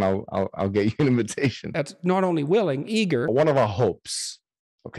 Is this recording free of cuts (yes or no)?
no